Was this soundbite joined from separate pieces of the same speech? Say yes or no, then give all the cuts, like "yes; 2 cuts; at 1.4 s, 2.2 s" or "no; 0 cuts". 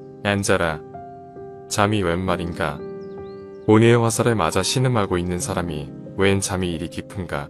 no; 0 cuts